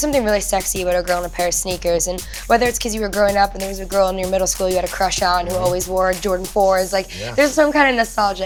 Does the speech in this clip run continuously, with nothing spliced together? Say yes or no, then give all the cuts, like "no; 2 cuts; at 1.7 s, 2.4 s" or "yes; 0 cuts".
yes; 0 cuts